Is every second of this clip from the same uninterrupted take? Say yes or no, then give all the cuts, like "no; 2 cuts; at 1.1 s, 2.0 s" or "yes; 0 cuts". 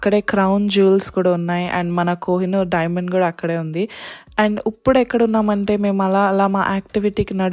yes; 0 cuts